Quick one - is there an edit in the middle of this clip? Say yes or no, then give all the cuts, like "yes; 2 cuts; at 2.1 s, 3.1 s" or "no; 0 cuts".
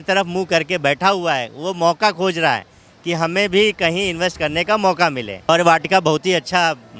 yes; 1 cut; at 5.5 s